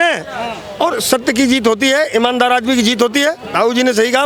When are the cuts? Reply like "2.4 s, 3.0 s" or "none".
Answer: none